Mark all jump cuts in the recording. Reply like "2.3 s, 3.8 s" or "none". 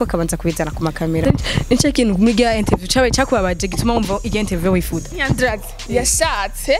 1.2 s, 5.1 s

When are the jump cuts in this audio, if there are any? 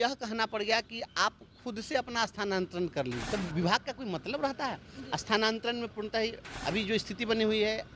3.2 s, 6.5 s

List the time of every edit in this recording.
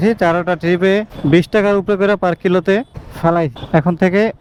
none

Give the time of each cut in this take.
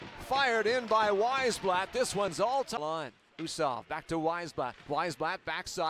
2.8 s

